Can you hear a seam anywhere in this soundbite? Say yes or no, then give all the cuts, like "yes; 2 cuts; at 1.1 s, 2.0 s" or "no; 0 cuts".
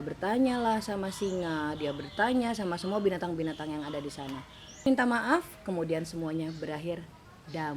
yes; 1 cut; at 4.9 s